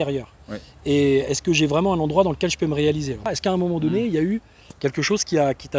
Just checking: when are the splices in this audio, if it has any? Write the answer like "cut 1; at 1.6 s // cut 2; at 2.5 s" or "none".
cut 1; at 3.3 s